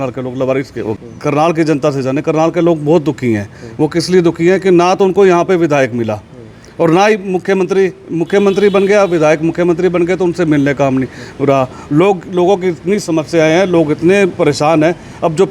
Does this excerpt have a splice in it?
yes; 1 cut; at 0.9 s

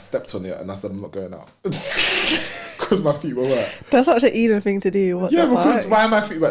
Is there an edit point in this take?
no; 0 cuts

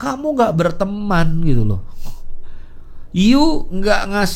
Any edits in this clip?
no; 0 cuts

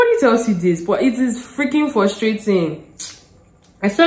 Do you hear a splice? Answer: no; 0 cuts

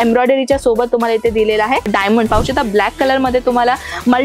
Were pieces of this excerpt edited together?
yes; 1 cut; at 2.3 s

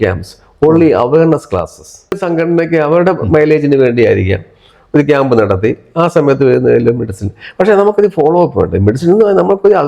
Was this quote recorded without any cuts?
no; 1 cut; at 2.2 s

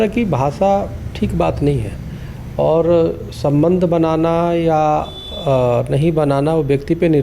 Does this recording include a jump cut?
no; 0 cuts

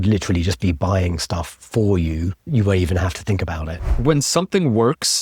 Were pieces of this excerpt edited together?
yes; 2 cuts; at 2.5 s, 3.7 s

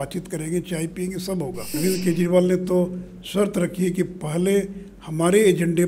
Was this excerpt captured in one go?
no; 1 cut; at 1.7 s

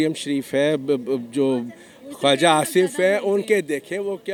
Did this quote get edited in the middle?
no; 0 cuts

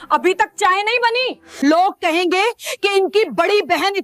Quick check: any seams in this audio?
yes; 1 cut; at 1.4 s

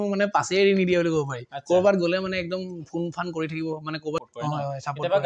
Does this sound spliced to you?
yes; 1 cut; at 4.2 s

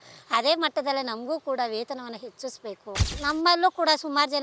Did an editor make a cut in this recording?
yes; 1 cut; at 3.2 s

